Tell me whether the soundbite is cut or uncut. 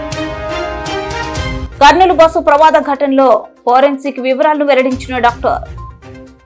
uncut